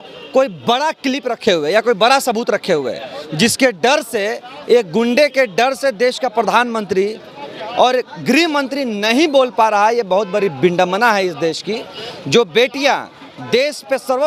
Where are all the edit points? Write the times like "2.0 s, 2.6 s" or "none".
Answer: none